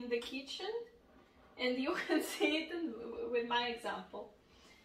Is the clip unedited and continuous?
yes; 0 cuts

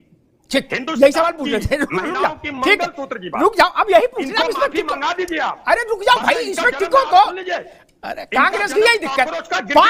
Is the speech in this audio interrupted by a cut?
no; 0 cuts

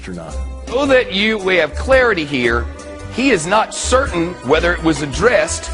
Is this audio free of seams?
no; 1 cut; at 2.8 s

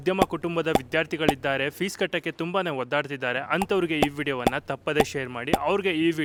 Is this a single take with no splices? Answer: yes; 0 cuts

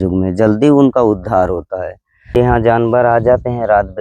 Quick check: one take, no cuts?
no; 1 cut; at 2.4 s

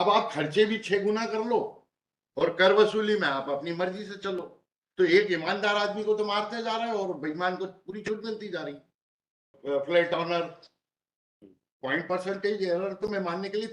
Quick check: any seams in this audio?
yes; 1 cut; at 9.5 s

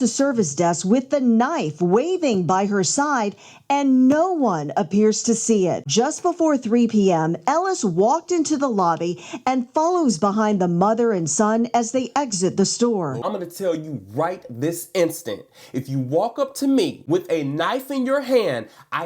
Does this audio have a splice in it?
yes; 2 cuts; at 5.8 s, 13.2 s

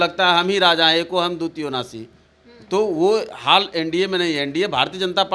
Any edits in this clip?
no; 0 cuts

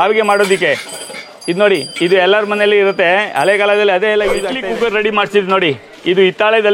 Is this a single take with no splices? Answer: no; 1 cut; at 4.5 s

